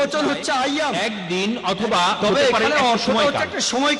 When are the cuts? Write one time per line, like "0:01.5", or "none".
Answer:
0:01.1